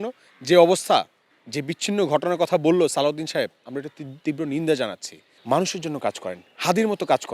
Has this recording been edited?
yes; 1 cut; at 5.3 s

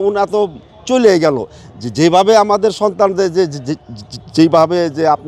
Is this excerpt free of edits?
yes; 0 cuts

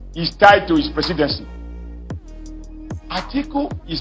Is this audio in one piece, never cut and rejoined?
no; 2 cuts; at 1.7 s, 3.1 s

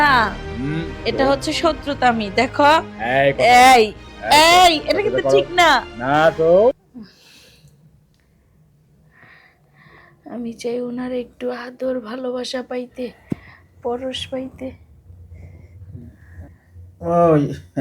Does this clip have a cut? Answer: yes; 2 cuts; at 6.8 s, 16.6 s

